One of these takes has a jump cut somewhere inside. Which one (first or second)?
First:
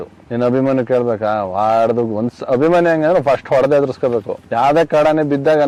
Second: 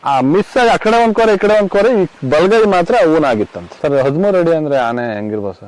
second